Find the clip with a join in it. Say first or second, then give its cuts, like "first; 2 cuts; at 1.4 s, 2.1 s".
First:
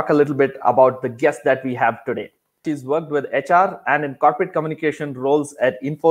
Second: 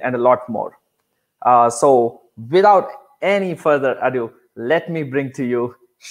first; 1 cut; at 2.7 s